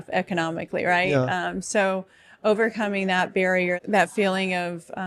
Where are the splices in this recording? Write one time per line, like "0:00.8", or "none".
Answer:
0:03.8